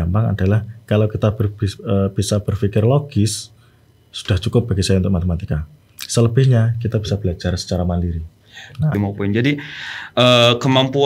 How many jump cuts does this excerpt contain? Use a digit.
1